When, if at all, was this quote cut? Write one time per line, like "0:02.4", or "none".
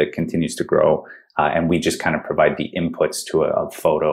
none